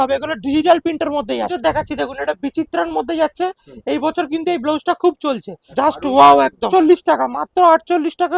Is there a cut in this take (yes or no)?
yes